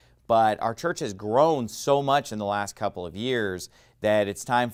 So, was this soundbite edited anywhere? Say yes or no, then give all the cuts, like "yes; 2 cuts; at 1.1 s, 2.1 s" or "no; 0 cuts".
no; 0 cuts